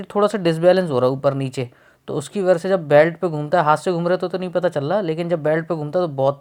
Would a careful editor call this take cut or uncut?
uncut